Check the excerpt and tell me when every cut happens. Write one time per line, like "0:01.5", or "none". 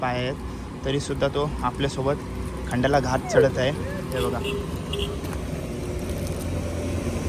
none